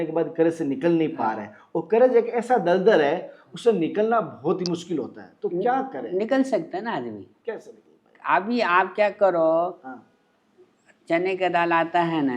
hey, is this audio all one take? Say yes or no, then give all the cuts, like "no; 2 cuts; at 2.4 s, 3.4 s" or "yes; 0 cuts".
yes; 0 cuts